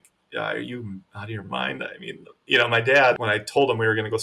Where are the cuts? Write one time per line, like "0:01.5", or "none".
0:03.1